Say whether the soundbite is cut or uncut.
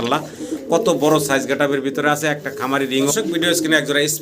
cut